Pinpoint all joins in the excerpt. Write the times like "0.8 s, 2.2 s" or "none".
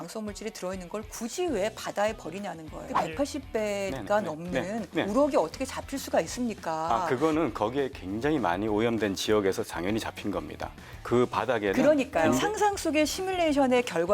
2.8 s, 12.4 s